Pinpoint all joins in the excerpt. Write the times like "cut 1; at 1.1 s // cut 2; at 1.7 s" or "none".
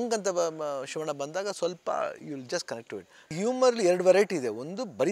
cut 1; at 3.3 s